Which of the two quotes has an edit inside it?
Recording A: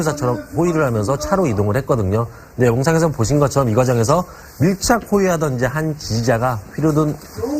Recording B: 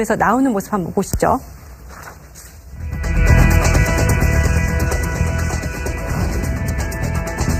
A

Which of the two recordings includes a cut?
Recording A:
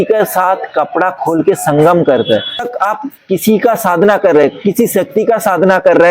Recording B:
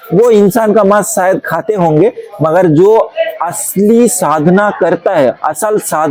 A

